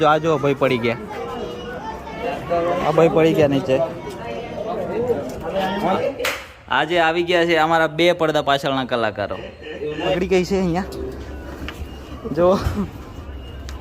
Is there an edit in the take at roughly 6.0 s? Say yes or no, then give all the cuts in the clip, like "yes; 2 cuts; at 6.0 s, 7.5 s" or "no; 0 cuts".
yes; 3 cuts; at 2.2 s, 6.0 s, 9.6 s